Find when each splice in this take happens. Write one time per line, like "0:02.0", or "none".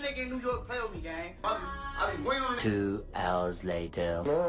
0:01.4